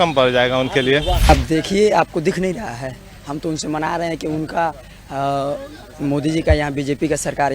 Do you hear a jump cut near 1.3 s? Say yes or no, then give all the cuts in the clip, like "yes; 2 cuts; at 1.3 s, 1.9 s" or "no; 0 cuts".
yes; 1 cut; at 1.3 s